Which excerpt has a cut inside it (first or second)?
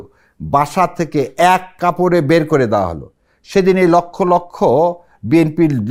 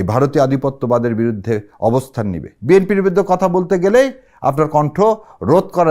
second